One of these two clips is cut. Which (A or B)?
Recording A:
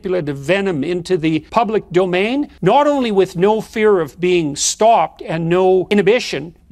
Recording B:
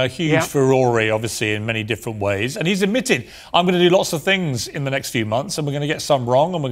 A